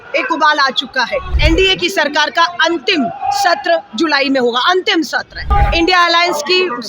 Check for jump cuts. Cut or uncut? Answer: cut